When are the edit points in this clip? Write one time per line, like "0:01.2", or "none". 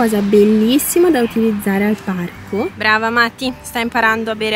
0:02.8